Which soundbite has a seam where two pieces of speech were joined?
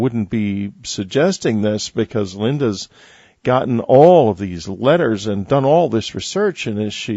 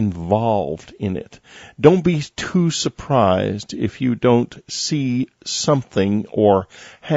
first; 1 cut; at 1.1 s

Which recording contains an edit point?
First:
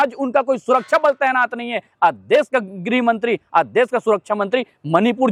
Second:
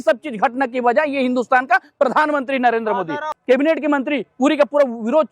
second; 1 cut; at 3.3 s

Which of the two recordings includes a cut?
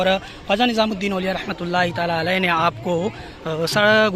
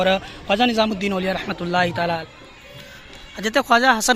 second; 1 cut; at 2.2 s

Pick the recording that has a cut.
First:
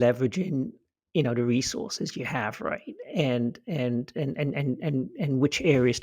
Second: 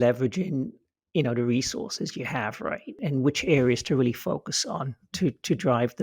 second; 1 cut; at 2.9 s

